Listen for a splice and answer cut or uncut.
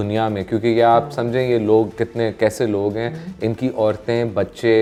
uncut